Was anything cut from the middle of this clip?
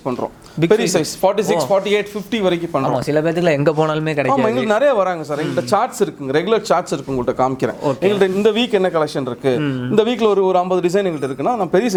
no; 0 cuts

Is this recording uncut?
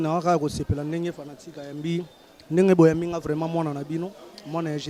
yes; 0 cuts

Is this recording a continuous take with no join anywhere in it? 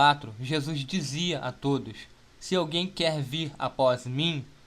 no; 1 cut; at 1.4 s

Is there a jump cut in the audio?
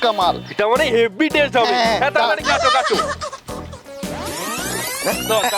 no; 0 cuts

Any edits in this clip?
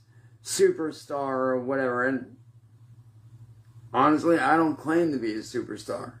no; 0 cuts

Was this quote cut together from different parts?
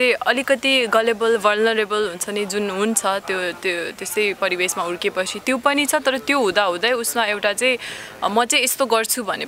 no; 0 cuts

